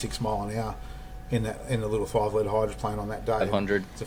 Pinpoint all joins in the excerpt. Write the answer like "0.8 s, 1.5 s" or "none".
none

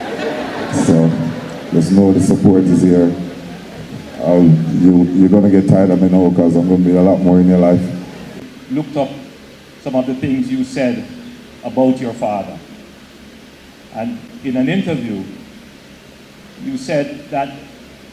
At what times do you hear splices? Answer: 8.3 s

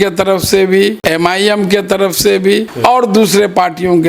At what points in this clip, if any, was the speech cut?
1.0 s, 2.7 s

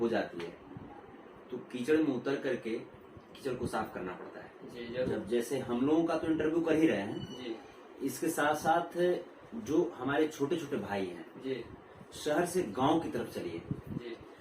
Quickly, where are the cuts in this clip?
5.1 s

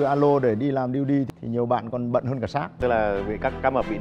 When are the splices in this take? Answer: 1.3 s, 2.8 s

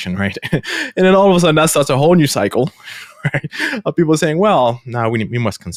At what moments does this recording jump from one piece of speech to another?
none

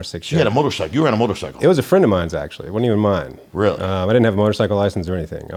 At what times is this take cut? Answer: none

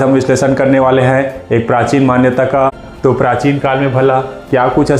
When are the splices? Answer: 2.8 s

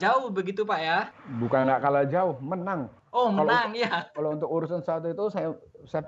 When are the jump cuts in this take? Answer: 1.2 s, 2.9 s

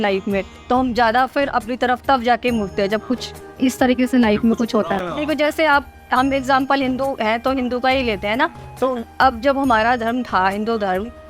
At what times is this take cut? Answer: 5.1 s

